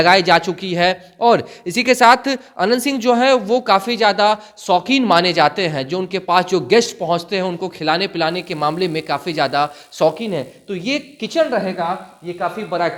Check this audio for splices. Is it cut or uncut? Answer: uncut